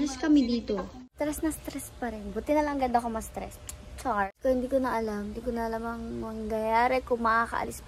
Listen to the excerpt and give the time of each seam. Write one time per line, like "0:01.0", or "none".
0:01.0
0:04.3